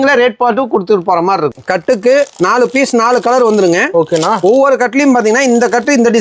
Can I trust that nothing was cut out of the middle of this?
no; 1 cut; at 1.6 s

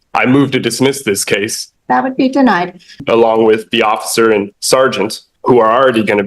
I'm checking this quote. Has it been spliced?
yes; 3 cuts; at 1.6 s, 3.0 s, 5.3 s

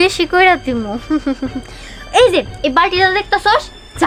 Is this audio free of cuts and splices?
yes; 0 cuts

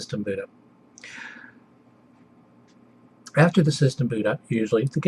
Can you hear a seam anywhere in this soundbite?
no; 0 cuts

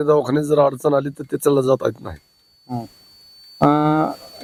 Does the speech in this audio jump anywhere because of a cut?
no; 0 cuts

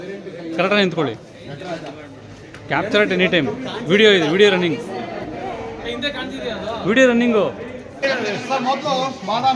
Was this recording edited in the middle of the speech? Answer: yes; 1 cut; at 8.0 s

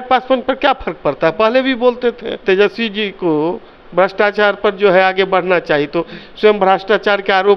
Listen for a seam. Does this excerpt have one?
yes; 1 cut; at 2.4 s

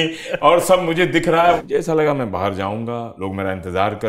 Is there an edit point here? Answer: yes; 2 cuts; at 1.6 s, 3.1 s

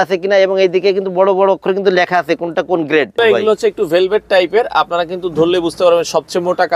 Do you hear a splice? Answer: yes; 1 cut; at 3.2 s

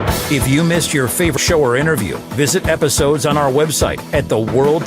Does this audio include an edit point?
yes; 1 cut; at 1.3 s

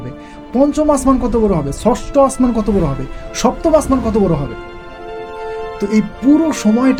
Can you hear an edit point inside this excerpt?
no; 0 cuts

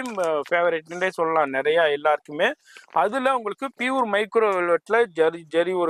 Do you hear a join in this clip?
no; 0 cuts

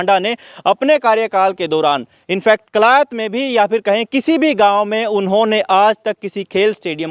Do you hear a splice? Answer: no; 0 cuts

